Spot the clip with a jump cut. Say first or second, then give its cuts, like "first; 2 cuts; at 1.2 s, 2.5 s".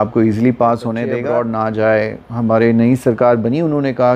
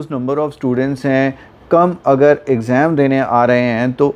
first; 1 cut; at 1.1 s